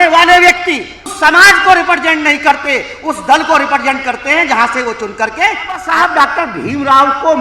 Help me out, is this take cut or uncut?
cut